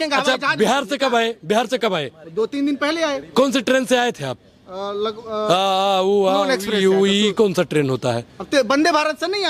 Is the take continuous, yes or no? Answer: yes